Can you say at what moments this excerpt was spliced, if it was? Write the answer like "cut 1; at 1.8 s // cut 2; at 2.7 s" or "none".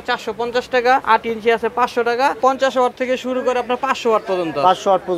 cut 1; at 1.0 s // cut 2; at 2.4 s